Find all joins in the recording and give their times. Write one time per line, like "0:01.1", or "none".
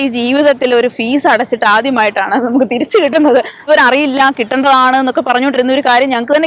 0:03.6